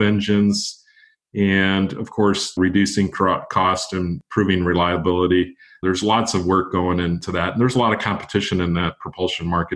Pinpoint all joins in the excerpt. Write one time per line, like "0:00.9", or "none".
0:02.5
0:04.2
0:05.7
0:07.2